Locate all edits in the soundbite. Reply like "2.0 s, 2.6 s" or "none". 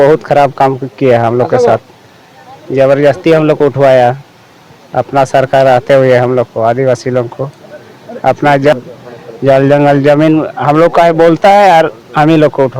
8.7 s